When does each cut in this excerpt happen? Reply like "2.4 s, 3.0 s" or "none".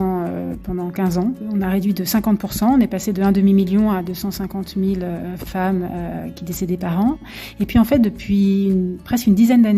1.4 s, 7.2 s